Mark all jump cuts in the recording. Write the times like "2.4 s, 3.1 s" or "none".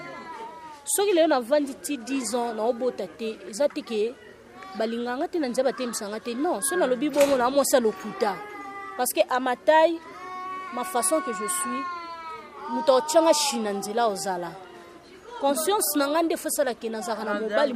none